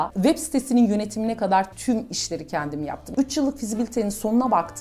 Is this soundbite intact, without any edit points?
no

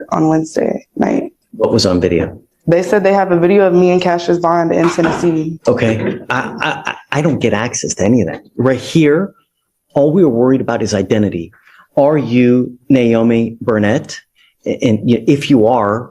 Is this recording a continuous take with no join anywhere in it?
no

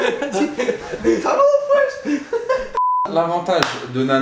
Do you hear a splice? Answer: yes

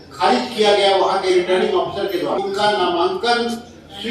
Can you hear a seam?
yes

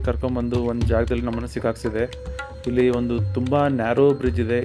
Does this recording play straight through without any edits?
yes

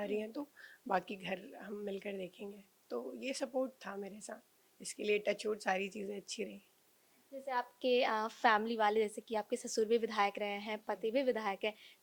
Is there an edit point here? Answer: no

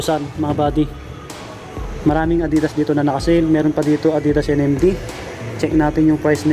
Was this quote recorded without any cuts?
yes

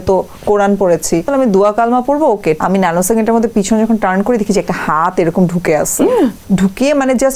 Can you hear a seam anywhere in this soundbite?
yes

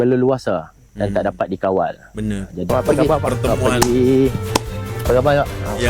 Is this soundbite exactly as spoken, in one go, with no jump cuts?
no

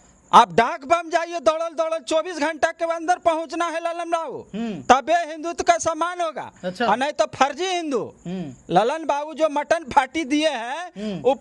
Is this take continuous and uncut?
yes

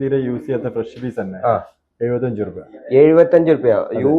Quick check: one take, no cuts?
yes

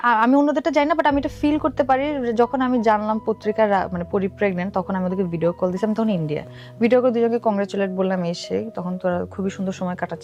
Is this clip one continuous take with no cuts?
yes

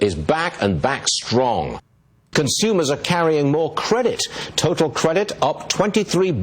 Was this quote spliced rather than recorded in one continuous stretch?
yes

